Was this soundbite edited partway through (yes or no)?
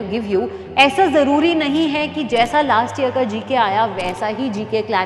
no